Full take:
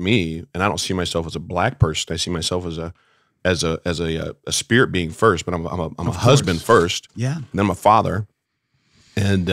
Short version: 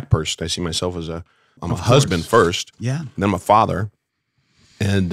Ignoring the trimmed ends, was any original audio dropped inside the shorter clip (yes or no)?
yes